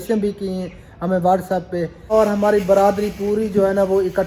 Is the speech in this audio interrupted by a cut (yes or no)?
yes